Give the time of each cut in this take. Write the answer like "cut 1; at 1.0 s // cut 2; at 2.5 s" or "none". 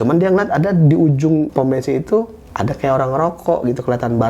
cut 1; at 1.5 s // cut 2; at 2.4 s